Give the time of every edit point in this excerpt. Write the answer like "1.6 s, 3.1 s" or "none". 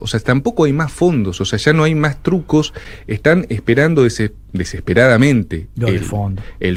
none